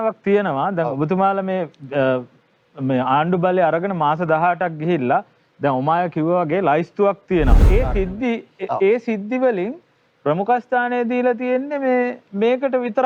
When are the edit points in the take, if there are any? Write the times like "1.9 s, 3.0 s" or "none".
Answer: 7.6 s